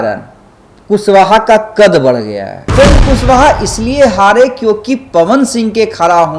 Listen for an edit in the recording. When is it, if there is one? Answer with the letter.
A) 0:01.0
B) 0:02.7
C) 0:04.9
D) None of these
B